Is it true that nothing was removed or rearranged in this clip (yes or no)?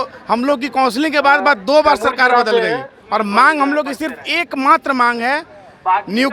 no